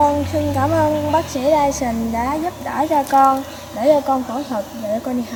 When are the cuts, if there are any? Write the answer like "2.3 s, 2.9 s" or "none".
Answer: none